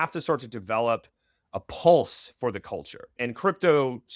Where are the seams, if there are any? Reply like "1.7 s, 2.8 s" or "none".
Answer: 3.2 s